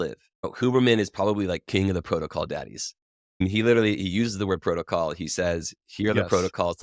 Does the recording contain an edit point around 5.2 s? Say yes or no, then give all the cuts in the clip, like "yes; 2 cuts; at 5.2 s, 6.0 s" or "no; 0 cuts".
no; 1 cut; at 3.4 s